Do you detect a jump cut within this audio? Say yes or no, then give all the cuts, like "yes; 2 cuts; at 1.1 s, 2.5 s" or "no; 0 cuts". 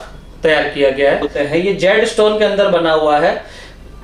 yes; 1 cut; at 1.4 s